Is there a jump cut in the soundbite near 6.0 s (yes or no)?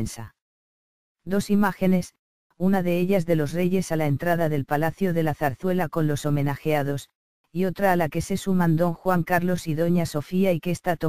no